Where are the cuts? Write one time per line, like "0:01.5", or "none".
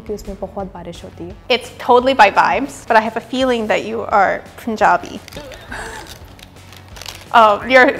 none